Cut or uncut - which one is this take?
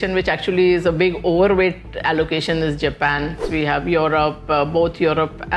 cut